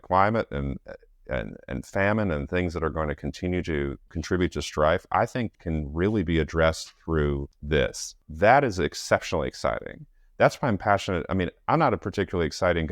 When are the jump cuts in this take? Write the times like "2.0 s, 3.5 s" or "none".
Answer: 4.1 s, 5.5 s, 7.5 s, 8.2 s